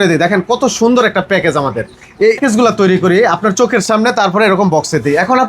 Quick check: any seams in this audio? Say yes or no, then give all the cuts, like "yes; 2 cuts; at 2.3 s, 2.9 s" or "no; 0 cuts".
yes; 1 cut; at 2.4 s